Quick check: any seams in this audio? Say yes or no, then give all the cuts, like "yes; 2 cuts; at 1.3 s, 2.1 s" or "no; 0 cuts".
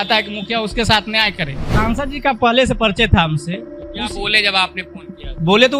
yes; 1 cut; at 1.7 s